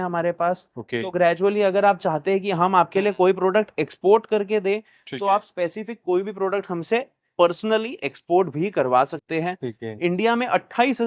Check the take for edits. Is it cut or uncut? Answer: uncut